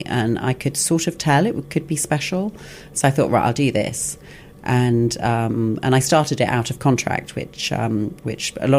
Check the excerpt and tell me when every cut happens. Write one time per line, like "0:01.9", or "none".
none